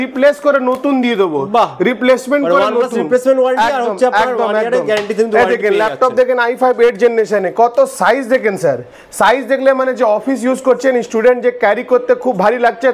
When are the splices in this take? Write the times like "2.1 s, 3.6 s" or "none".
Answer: none